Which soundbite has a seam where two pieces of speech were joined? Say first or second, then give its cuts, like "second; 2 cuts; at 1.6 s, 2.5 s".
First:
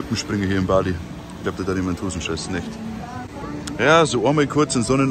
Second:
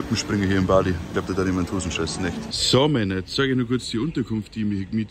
second; 2 cuts; at 1.0 s, 2.5 s